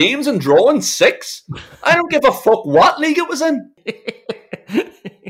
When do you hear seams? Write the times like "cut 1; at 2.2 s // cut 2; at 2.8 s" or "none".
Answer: cut 1; at 3.7 s

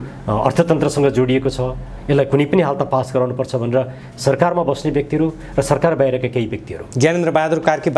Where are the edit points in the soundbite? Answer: none

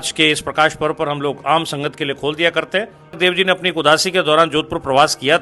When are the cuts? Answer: cut 1; at 3.2 s

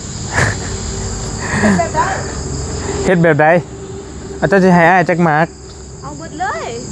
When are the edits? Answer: none

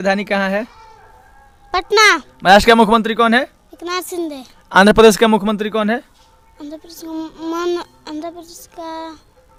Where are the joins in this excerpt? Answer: none

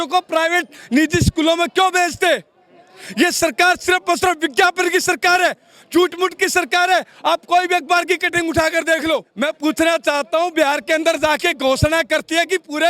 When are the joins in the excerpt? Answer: cut 1; at 9.3 s

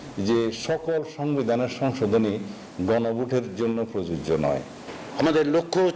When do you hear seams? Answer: cut 1; at 5.0 s

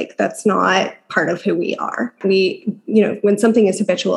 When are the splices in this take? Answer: cut 1; at 2.2 s

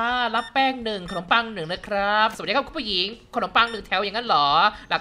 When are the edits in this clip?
cut 1; at 2.3 s

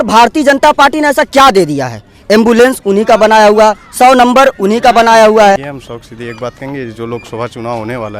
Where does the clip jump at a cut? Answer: cut 1; at 5.6 s

